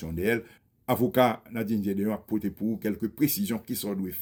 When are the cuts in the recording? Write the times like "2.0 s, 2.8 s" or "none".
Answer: none